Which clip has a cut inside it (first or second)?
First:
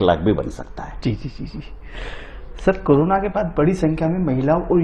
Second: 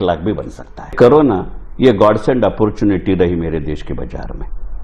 second